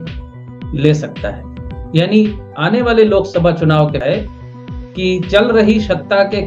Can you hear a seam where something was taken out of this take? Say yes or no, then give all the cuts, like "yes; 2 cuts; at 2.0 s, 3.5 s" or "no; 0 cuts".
yes; 1 cut; at 4.0 s